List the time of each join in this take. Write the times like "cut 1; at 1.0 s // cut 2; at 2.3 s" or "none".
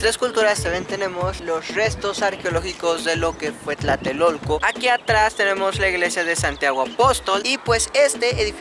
cut 1; at 4.6 s // cut 2; at 7.4 s